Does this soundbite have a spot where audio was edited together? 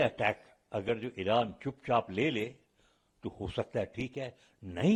no; 0 cuts

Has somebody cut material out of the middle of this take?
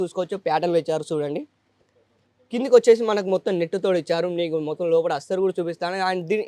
no; 0 cuts

